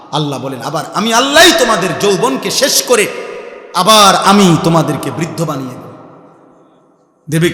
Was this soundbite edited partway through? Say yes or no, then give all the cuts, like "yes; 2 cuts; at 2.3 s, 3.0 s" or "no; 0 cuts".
no; 0 cuts